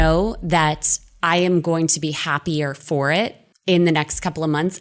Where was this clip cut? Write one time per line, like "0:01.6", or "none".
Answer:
0:03.5